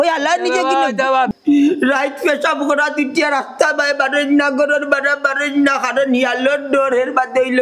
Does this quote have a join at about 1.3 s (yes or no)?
yes